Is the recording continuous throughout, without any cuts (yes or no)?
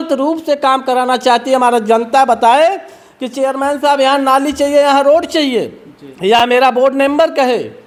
yes